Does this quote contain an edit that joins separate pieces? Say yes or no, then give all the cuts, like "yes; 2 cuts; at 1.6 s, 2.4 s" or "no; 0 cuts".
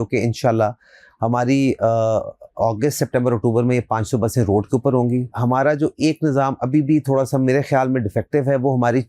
yes; 1 cut; at 5.3 s